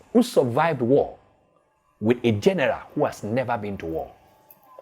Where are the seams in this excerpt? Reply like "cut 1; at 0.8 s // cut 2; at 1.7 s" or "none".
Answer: none